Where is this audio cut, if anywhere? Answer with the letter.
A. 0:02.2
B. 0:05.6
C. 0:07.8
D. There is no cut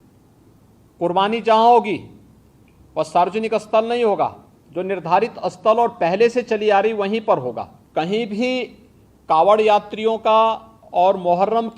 C